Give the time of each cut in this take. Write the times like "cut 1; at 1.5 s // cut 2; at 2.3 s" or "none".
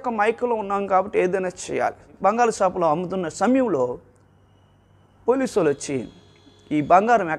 cut 1; at 2.1 s